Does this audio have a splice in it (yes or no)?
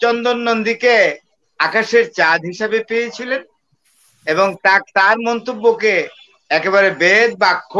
no